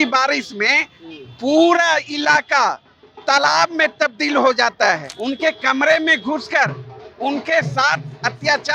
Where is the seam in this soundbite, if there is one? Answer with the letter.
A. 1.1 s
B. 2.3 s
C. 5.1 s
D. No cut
C